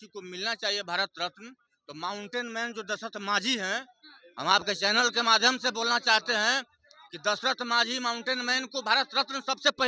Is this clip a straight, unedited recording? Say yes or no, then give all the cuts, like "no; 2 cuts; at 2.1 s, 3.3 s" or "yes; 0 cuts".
yes; 0 cuts